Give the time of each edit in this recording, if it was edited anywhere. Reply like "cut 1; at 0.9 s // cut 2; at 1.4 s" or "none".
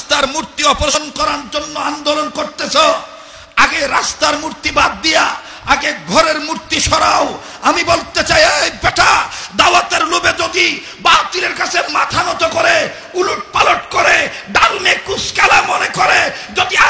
cut 1; at 0.9 s